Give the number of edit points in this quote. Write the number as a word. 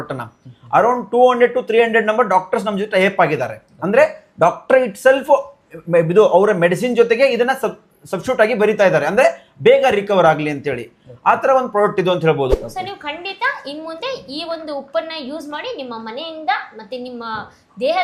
one